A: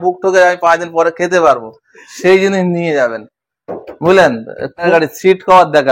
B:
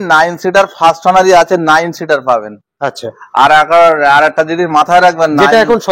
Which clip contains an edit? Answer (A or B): A